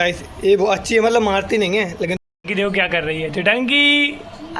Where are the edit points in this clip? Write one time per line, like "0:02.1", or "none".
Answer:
0:02.2